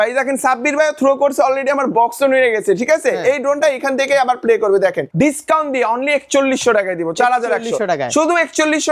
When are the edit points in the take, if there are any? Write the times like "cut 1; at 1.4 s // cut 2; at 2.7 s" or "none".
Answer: cut 1; at 5.0 s